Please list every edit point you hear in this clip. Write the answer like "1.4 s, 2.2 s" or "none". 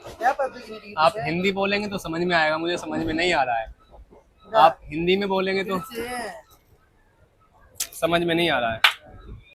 none